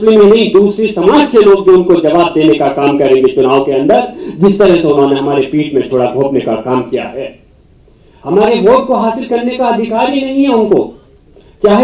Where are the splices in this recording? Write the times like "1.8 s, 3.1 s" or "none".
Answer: none